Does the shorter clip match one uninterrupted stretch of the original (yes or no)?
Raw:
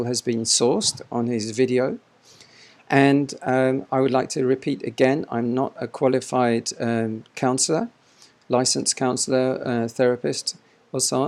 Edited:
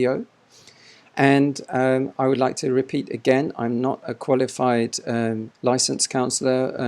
no